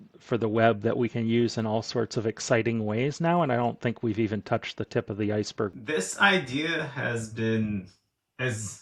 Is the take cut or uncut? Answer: cut